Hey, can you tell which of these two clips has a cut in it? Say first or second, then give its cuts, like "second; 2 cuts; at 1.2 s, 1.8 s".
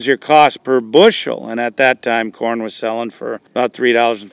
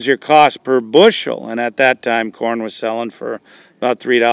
first; 1 cut; at 3.4 s